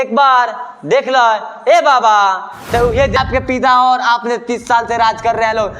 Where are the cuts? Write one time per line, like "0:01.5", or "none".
0:03.1